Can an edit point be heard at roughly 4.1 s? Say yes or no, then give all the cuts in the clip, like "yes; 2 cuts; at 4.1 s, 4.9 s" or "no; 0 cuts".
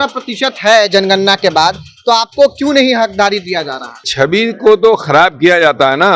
yes; 1 cut; at 4.1 s